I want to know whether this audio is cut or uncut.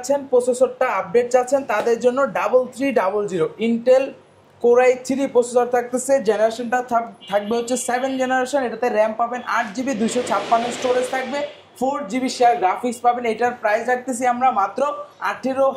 uncut